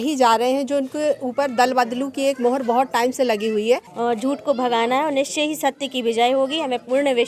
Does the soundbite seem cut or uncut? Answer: cut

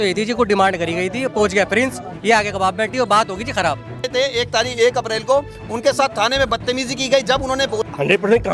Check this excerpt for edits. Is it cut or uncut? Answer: cut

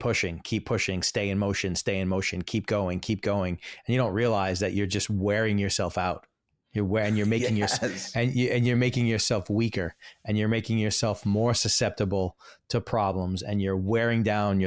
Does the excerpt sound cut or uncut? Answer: uncut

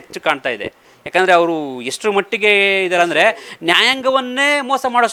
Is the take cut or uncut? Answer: uncut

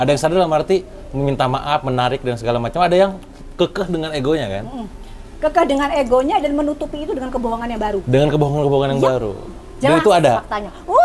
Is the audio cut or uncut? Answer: uncut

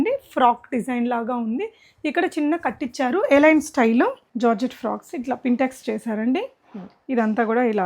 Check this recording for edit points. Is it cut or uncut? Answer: cut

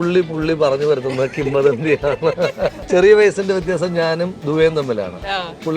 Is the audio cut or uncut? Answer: cut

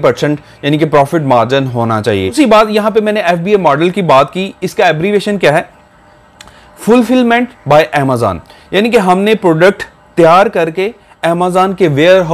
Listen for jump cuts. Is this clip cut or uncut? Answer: cut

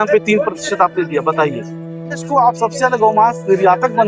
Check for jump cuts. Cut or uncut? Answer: cut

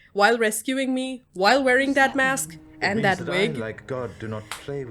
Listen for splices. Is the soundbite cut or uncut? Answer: uncut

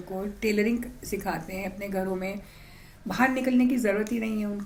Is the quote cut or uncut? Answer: uncut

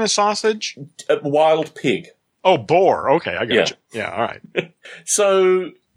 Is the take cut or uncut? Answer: uncut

